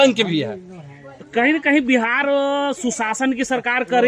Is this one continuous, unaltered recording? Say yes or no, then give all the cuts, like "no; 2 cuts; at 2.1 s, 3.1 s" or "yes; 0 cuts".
yes; 0 cuts